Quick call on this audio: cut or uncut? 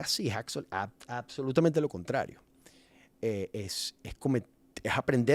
uncut